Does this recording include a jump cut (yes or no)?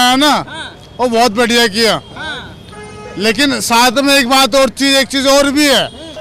no